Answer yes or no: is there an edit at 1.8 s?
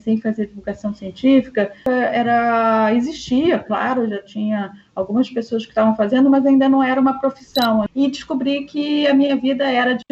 yes